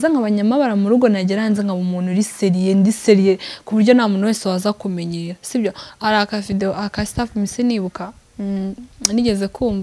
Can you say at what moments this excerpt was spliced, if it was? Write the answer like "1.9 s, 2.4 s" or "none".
none